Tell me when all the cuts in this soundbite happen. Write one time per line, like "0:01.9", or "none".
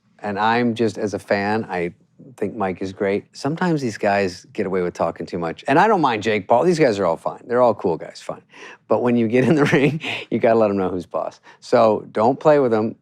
0:03.3
0:05.6